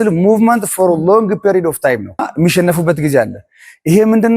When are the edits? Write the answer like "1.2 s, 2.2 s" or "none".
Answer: 2.3 s